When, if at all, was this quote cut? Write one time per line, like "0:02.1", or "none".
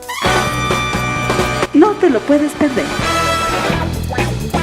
0:03.6